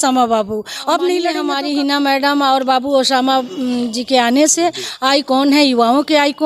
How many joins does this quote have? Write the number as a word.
one